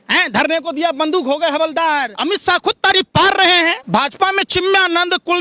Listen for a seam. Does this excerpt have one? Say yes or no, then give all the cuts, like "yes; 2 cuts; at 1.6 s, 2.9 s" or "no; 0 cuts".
yes; 2 cuts; at 2.1 s, 3.8 s